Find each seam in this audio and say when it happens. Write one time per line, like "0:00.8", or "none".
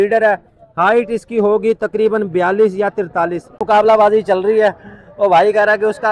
0:03.6